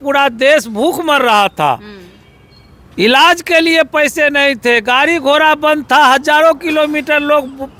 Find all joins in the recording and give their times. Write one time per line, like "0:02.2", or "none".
none

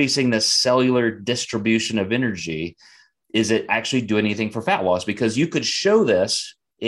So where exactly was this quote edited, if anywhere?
none

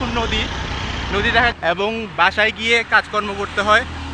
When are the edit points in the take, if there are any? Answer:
0:01.6

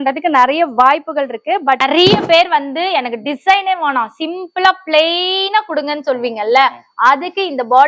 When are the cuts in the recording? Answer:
0:01.8

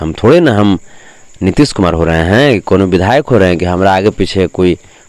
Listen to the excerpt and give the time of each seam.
none

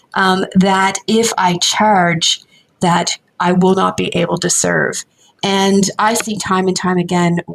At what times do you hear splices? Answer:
none

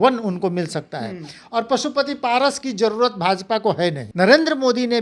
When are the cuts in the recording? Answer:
0:04.0

